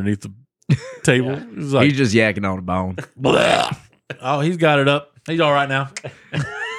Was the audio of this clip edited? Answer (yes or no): no